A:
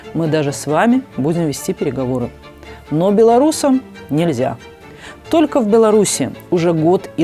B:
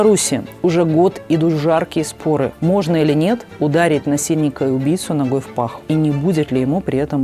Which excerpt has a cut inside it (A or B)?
B